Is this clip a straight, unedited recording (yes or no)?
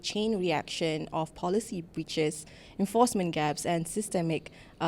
yes